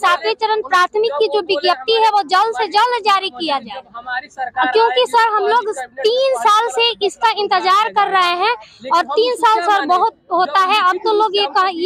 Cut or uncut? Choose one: uncut